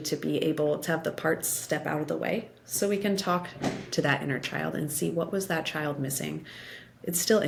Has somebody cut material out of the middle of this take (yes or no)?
no